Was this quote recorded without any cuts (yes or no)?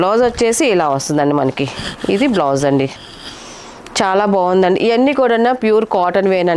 yes